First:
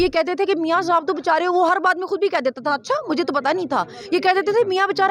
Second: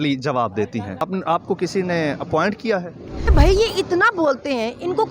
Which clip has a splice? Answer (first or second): second